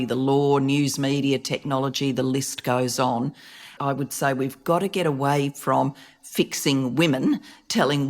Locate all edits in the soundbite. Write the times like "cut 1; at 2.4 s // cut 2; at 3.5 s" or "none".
cut 1; at 3.7 s